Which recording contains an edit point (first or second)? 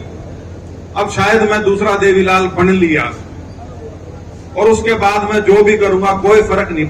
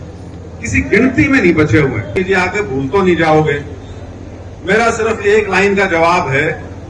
second